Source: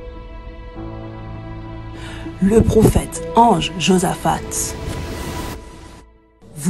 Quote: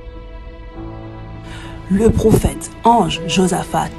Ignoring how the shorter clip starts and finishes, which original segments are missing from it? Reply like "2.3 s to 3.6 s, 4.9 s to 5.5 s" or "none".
1.9 s to 2.4 s